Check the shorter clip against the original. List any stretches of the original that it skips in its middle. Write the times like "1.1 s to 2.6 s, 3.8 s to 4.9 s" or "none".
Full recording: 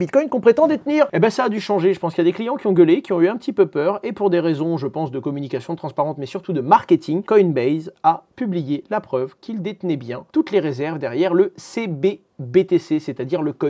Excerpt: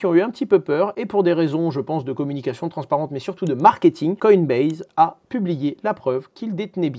none